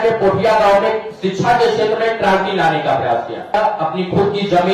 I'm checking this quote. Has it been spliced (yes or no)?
yes